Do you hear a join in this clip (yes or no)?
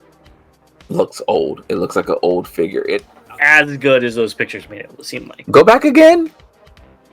yes